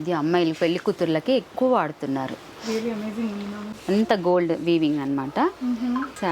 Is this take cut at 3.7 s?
yes; 1 cut; at 3.7 s

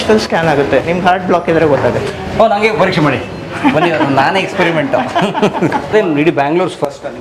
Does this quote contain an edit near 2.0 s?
no; 0 cuts

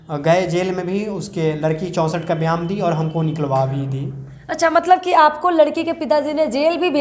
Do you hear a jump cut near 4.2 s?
no; 0 cuts

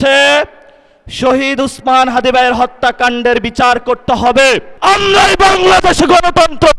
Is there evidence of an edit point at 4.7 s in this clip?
yes; 1 cut; at 4.7 s

